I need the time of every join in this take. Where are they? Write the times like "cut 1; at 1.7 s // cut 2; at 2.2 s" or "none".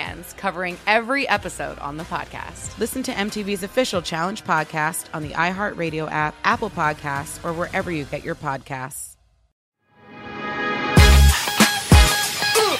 cut 1; at 9.7 s